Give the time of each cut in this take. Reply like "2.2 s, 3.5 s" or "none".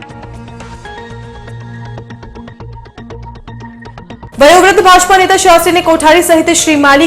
none